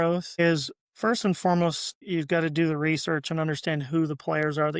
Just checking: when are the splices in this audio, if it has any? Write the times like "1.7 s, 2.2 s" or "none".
1.9 s